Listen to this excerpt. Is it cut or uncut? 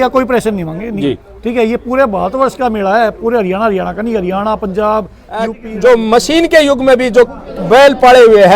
cut